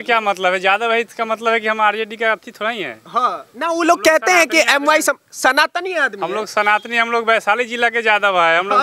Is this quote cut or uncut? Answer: uncut